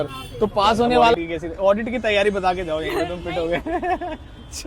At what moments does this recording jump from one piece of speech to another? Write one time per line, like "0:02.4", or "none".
0:01.1